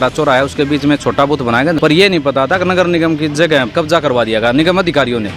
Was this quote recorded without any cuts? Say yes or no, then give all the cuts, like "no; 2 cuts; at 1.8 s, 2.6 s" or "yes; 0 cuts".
no; 2 cuts; at 1.8 s, 3.7 s